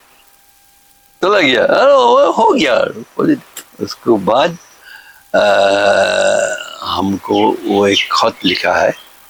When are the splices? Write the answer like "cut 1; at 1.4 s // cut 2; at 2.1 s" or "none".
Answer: none